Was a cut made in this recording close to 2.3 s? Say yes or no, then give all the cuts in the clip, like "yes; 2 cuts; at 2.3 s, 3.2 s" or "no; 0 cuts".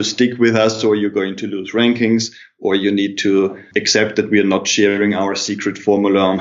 no; 0 cuts